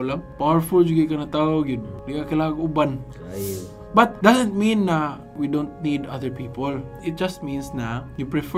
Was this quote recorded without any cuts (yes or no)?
yes